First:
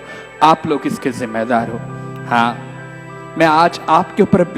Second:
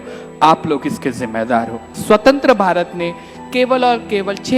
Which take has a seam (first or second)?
second